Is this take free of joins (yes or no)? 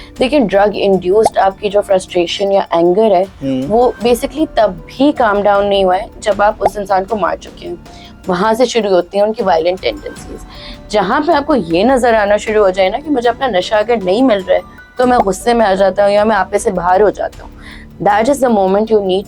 yes